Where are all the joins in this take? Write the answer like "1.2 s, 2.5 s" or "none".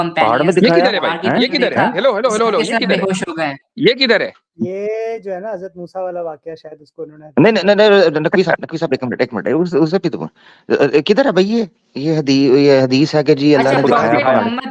none